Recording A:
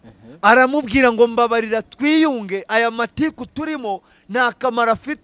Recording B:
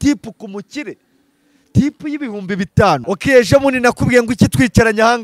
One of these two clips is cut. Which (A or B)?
B